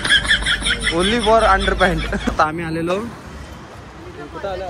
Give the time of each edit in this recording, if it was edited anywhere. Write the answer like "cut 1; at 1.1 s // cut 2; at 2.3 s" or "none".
cut 1; at 2.3 s